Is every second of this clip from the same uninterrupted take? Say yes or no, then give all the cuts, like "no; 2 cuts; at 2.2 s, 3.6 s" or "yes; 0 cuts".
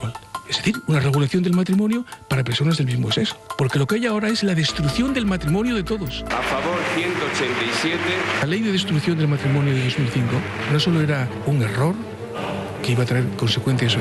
yes; 0 cuts